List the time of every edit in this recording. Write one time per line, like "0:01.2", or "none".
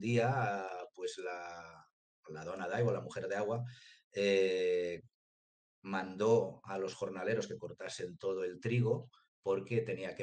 none